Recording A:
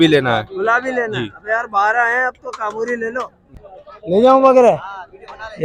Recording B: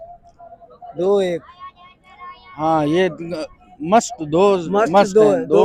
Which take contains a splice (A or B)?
A